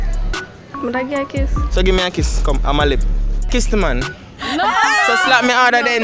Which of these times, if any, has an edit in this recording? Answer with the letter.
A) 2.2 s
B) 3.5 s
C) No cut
B